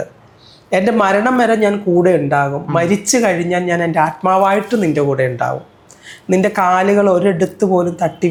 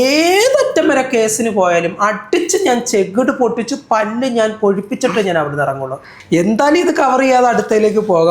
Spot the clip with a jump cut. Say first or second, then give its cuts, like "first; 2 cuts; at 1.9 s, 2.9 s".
second; 1 cut; at 6.1 s